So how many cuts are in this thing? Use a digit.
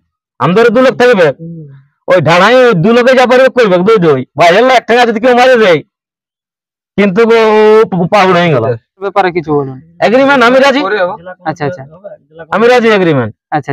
1